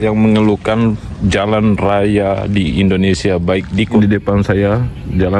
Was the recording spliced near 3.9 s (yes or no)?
yes